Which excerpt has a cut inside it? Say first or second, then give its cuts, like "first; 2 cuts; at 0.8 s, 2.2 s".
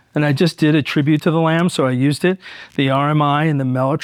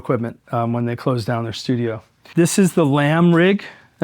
second; 1 cut; at 2.2 s